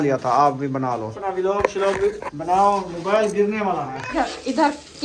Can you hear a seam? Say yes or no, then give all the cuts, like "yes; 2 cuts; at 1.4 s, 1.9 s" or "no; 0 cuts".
yes; 2 cuts; at 1.1 s, 4.0 s